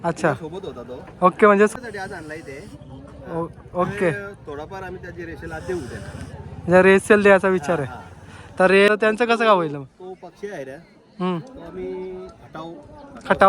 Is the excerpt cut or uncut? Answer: cut